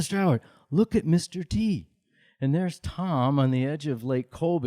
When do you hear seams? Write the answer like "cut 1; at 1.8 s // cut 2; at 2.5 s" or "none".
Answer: cut 1; at 2.2 s